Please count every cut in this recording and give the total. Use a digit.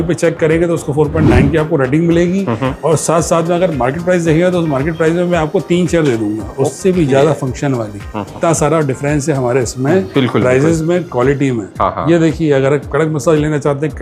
1